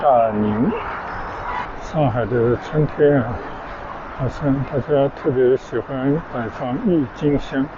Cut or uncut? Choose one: cut